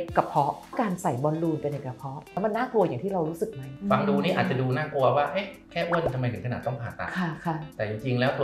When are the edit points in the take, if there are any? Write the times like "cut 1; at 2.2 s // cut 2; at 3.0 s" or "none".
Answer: cut 1; at 0.7 s // cut 2; at 2.3 s // cut 3; at 3.7 s